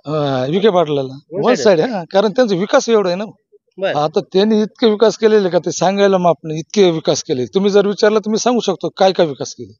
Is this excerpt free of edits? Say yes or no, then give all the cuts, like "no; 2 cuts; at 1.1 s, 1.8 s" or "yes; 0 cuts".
yes; 0 cuts